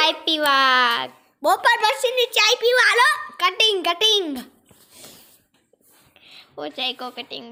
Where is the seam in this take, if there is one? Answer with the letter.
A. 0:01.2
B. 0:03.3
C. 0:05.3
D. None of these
D